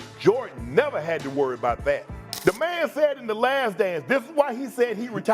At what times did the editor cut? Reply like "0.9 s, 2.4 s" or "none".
2.3 s